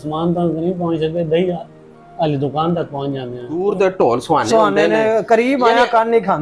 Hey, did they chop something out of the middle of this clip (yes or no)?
yes